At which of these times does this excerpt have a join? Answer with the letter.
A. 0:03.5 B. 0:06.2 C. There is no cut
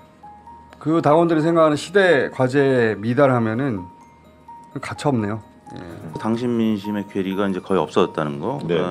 B